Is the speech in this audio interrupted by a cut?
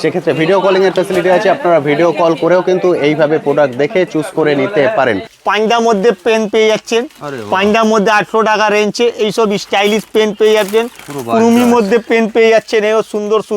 yes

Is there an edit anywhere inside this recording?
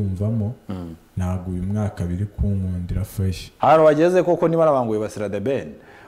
yes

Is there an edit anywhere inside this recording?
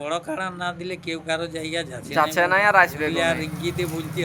no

